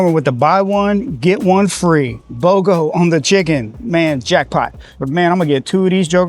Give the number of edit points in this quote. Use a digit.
1